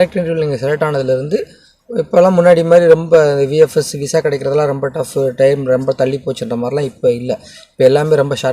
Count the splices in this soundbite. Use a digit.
0